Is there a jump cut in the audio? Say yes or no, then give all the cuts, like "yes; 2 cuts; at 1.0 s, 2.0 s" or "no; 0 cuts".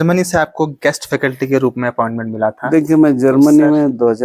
no; 0 cuts